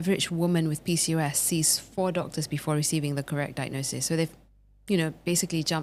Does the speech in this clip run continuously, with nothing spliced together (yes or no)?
yes